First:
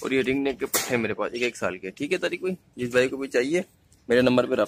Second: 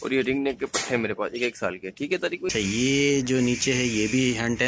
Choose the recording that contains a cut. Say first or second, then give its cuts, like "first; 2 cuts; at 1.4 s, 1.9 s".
second; 1 cut; at 2.5 s